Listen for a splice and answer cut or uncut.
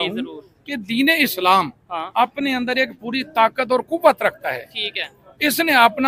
uncut